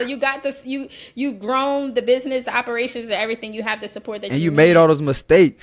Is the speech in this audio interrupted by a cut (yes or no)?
no